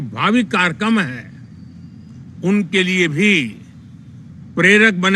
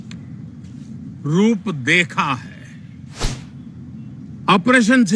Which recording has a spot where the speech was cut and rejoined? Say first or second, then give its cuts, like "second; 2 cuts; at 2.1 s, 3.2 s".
second; 1 cut; at 3.4 s